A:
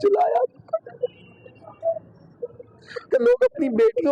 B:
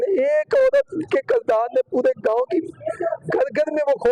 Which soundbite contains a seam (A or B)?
A